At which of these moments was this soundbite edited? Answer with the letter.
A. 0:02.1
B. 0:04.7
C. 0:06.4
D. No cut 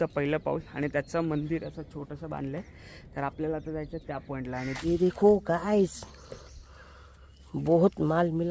B